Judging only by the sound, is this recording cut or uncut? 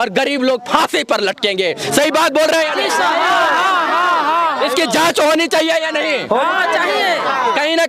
uncut